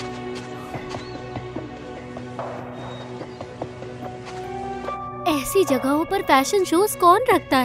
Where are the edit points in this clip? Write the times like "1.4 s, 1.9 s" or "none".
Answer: none